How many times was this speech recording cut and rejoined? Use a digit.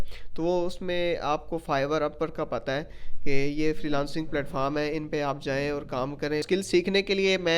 1